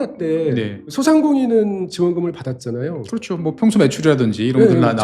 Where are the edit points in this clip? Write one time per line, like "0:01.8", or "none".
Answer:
0:00.9

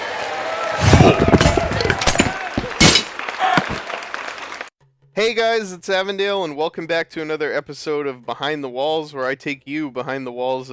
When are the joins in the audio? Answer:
none

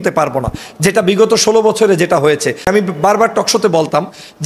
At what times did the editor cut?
0:02.7

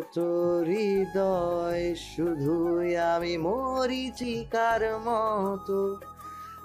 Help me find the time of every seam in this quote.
0:04.2

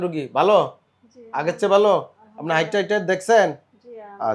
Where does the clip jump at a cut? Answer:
none

